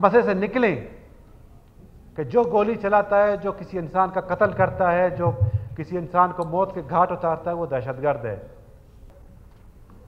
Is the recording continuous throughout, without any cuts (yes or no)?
no